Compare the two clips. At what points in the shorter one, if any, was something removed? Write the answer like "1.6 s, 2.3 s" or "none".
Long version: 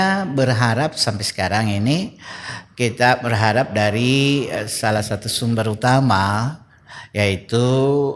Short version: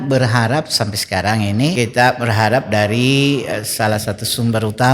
1.7 s